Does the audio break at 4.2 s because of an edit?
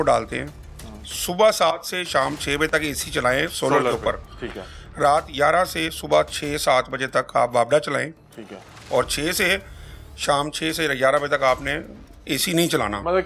no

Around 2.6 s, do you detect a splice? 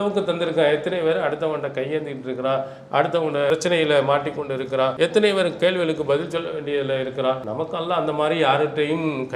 no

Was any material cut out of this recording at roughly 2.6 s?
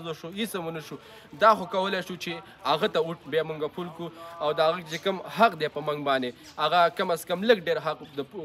no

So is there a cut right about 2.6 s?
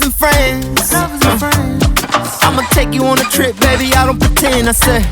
no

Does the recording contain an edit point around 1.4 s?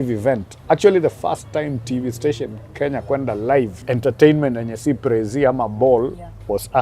no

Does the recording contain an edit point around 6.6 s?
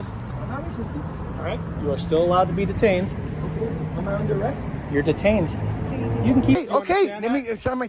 yes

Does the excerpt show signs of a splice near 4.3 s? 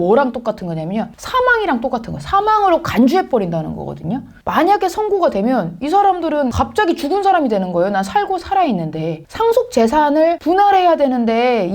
yes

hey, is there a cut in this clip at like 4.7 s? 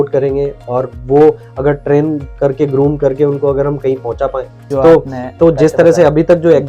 yes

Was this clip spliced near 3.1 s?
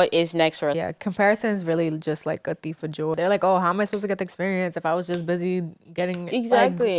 yes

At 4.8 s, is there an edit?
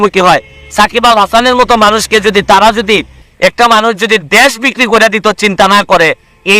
no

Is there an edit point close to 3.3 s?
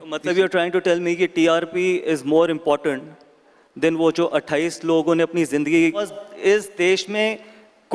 no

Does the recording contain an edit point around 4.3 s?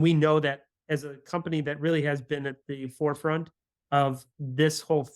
yes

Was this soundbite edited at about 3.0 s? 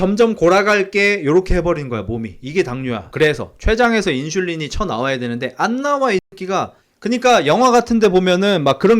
yes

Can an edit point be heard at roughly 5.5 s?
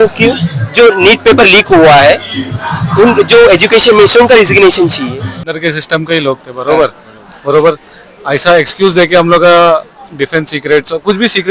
yes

